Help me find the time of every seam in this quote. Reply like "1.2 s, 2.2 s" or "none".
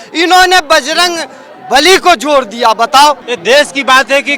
3.3 s